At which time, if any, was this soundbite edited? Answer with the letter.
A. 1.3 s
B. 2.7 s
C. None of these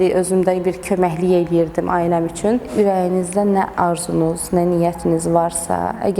B